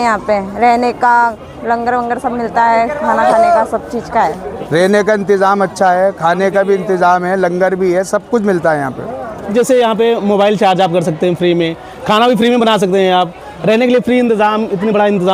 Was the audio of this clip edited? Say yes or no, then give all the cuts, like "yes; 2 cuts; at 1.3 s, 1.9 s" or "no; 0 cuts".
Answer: yes; 2 cuts; at 4.5 s, 9.5 s